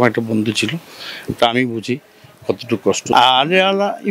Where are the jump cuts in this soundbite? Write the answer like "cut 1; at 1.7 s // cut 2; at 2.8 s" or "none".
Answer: cut 1; at 3.1 s